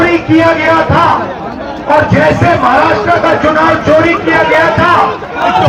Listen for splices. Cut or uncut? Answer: uncut